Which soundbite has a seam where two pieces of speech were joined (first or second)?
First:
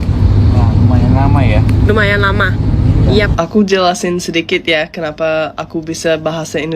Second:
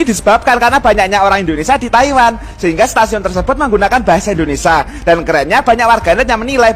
first